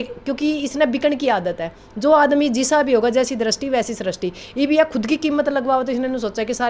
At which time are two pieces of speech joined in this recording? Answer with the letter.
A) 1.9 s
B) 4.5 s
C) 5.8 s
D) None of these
D